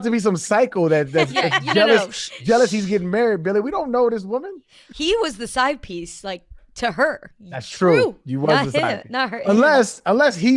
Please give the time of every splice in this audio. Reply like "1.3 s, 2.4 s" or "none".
none